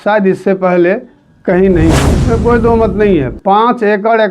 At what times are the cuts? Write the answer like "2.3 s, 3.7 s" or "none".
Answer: 2.1 s